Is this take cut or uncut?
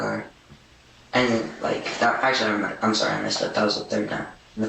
uncut